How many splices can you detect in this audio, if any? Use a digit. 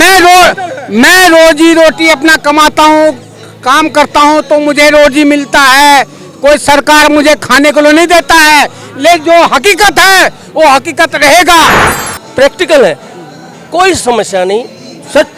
1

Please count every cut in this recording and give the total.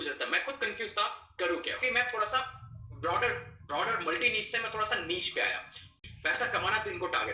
2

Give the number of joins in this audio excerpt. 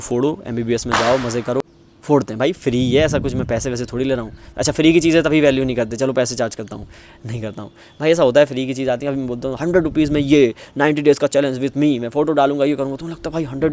1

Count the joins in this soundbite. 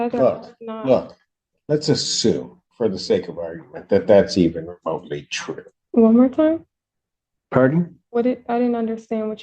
1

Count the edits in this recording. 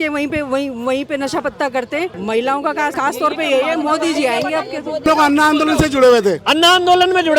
3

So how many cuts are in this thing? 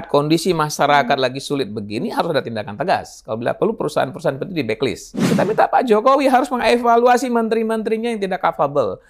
1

